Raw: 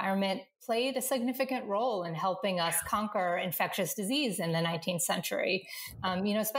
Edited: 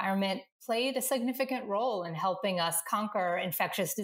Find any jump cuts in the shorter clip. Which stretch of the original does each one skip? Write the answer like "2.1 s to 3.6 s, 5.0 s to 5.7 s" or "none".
none